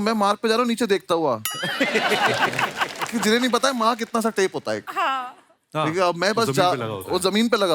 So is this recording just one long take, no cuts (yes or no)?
yes